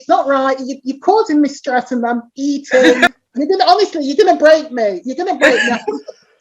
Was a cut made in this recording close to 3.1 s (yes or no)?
yes